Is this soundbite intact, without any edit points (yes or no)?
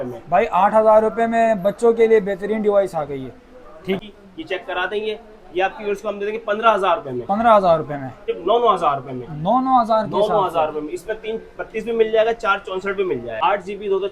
no